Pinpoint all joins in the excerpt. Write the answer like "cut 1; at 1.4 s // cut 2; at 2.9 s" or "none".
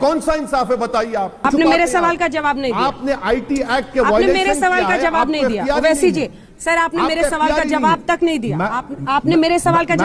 cut 1; at 1.4 s